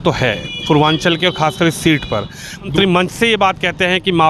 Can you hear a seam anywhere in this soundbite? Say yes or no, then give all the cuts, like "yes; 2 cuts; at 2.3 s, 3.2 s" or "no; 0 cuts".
yes; 1 cut; at 2.7 s